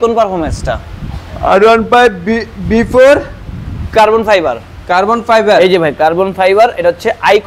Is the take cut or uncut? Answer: uncut